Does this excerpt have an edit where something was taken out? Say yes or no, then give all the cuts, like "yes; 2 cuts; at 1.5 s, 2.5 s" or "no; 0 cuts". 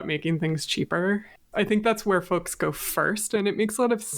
yes; 2 cuts; at 1.5 s, 3.4 s